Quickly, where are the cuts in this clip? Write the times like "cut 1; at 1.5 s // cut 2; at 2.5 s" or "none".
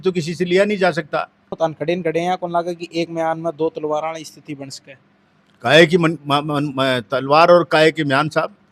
cut 1; at 1.5 s

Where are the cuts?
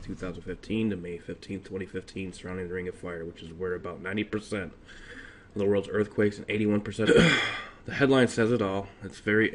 none

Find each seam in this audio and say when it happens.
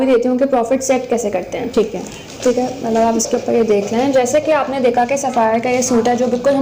none

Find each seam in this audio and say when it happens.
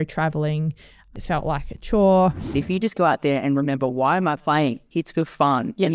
cut 1; at 1.1 s // cut 2; at 2.5 s

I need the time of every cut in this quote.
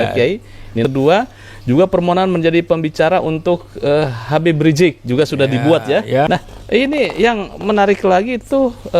cut 1; at 0.8 s // cut 2; at 6.3 s

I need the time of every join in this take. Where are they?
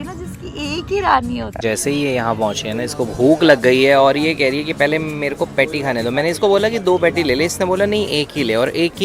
cut 1; at 1.5 s

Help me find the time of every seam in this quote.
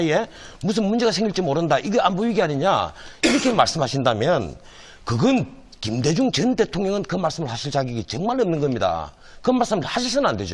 cut 1; at 2.9 s

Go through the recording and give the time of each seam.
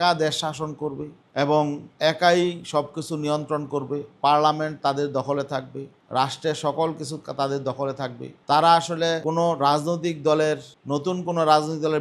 none

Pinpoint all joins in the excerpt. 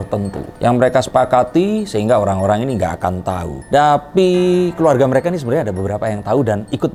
none

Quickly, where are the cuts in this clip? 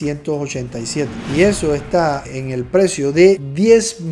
none

